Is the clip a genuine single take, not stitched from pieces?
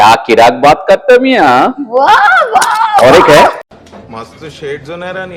yes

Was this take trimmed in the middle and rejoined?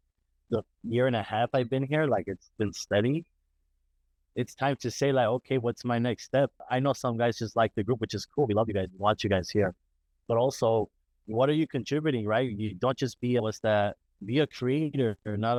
no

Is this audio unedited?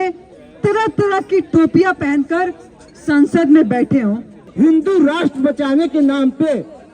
no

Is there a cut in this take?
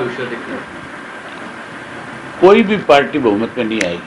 no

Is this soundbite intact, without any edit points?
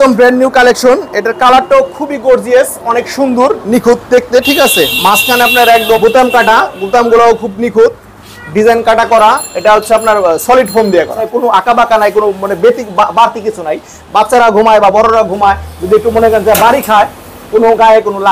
no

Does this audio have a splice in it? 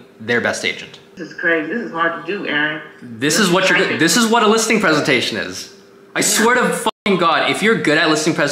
yes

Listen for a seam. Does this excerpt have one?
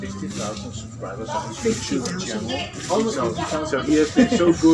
no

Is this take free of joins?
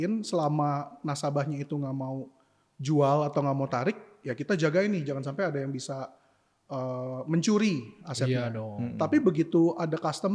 yes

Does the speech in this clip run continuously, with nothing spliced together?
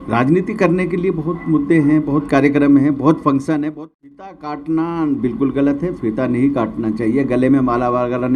no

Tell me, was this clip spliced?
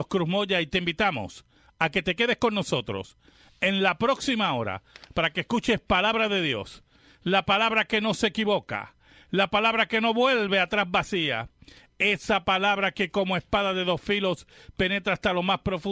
no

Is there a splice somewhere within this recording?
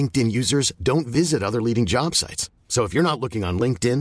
no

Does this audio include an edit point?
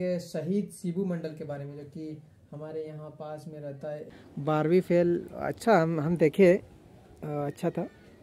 yes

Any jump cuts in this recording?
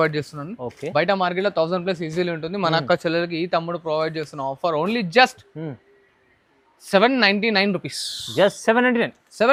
no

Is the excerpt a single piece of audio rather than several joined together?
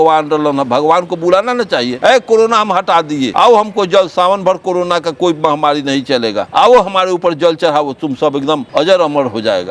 yes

